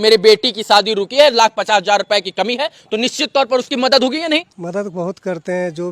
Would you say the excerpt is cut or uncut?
cut